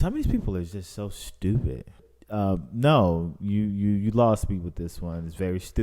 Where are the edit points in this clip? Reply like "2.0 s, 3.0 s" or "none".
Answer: 2.1 s